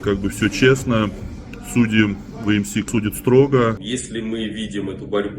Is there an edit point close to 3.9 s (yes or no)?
yes